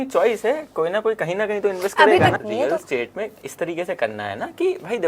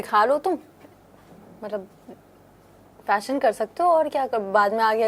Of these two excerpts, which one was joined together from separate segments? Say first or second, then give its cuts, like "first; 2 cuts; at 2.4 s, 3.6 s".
first; 1 cut; at 2.4 s